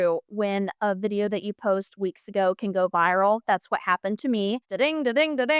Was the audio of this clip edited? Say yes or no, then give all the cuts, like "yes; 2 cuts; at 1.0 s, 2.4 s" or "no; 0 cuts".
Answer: yes; 1 cut; at 4.7 s